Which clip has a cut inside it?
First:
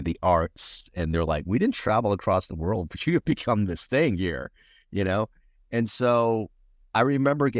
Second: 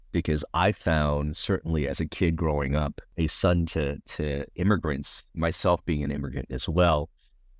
second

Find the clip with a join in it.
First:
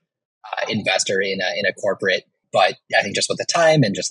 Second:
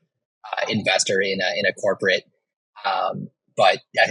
first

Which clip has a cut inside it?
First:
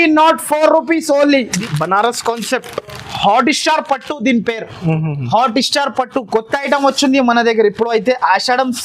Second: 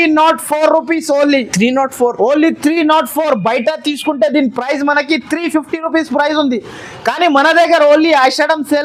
first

